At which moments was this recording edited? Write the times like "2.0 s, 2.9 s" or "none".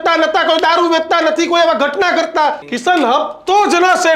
2.7 s

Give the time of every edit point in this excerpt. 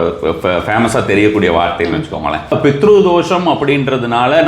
2.5 s

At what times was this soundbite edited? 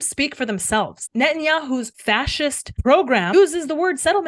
1.0 s, 1.9 s, 3.3 s

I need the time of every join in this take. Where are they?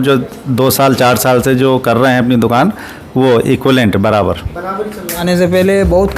5.2 s

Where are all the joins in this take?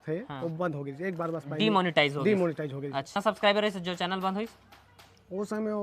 3.1 s

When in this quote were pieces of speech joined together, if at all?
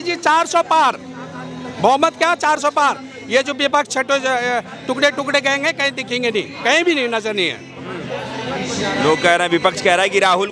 none

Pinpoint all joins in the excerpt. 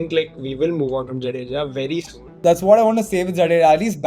2.4 s

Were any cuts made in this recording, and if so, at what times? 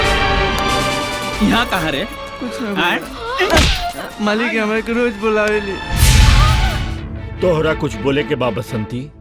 6.7 s

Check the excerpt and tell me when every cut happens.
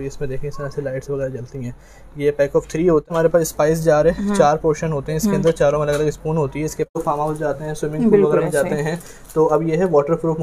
3.0 s, 7.0 s

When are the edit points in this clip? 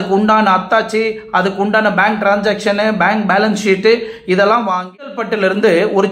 5.2 s

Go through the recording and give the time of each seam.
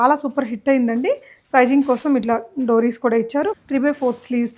3.6 s

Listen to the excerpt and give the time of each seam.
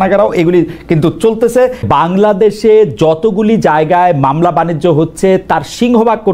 1.8 s

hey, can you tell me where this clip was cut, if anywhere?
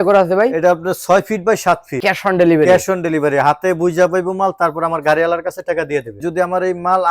1.9 s, 6.2 s

